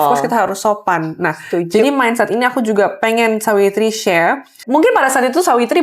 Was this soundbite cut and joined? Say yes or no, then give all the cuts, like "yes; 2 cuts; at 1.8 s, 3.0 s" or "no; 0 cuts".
no; 0 cuts